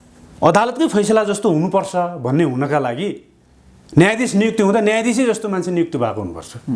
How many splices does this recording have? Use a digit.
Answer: 0